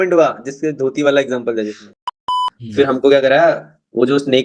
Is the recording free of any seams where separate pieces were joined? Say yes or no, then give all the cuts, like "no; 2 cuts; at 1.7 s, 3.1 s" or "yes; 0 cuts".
no; 1 cut; at 2.2 s